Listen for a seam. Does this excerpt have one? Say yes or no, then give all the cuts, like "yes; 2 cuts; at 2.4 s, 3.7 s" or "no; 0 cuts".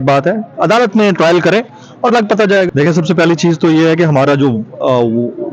yes; 1 cut; at 2.7 s